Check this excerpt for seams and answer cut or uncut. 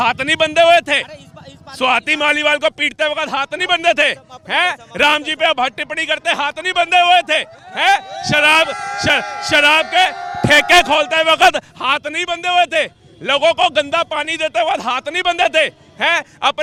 uncut